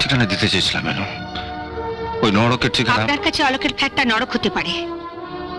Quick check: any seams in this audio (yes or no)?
no